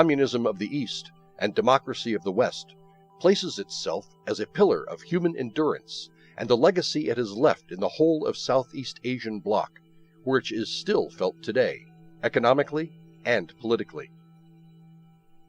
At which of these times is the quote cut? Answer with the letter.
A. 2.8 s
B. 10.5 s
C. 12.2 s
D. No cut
B